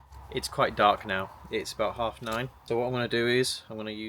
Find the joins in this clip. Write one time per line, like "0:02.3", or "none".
0:02.6